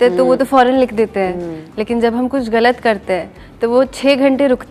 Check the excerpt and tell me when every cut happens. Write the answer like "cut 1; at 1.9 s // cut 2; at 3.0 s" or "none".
none